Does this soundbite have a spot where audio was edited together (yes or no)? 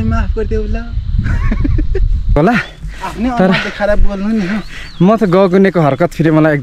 yes